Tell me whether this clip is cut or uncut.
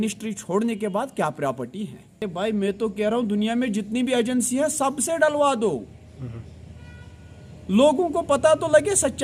uncut